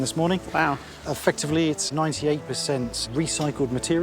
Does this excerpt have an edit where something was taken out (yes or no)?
yes